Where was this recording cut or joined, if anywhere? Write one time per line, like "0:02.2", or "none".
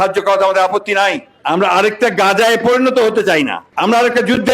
0:01.3
0:03.6